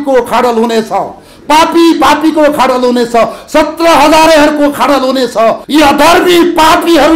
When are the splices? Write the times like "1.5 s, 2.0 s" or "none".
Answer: 5.6 s